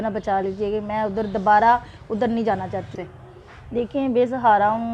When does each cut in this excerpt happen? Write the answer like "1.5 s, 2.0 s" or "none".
2.9 s